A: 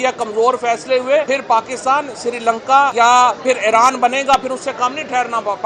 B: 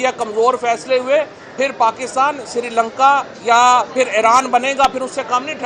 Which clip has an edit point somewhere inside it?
A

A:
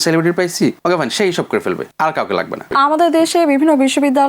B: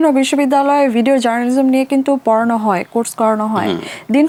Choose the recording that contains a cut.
A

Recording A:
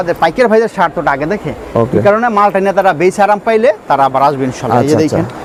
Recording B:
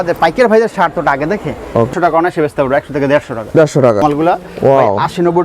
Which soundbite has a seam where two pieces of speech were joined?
B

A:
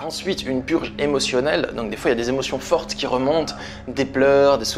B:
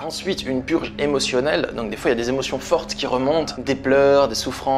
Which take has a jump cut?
B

